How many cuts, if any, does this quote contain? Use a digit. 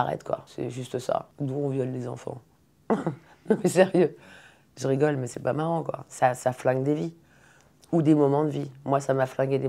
0